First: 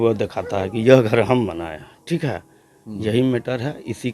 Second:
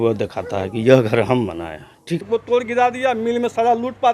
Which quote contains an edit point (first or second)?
second